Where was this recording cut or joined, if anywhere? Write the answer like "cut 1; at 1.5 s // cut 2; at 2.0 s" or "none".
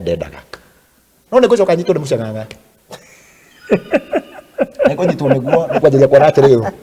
cut 1; at 1.1 s